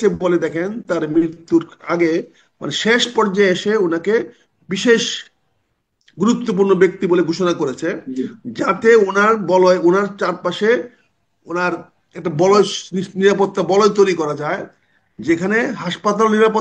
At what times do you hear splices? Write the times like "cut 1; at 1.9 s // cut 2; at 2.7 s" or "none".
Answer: none

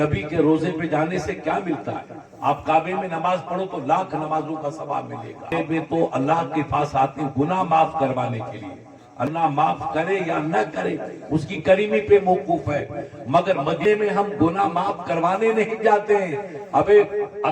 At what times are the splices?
cut 1; at 5.5 s // cut 2; at 9.3 s // cut 3; at 13.8 s

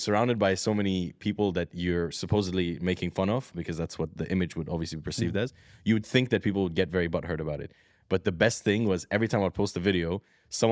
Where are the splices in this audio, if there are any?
none

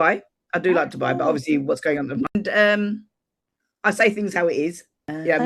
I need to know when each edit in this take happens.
cut 1; at 2.3 s

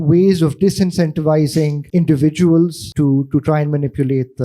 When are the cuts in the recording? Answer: cut 1; at 1.8 s // cut 2; at 2.8 s

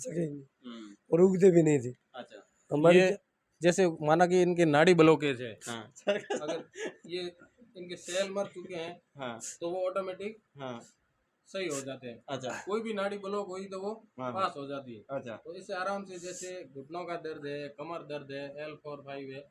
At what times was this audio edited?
cut 1; at 3.0 s

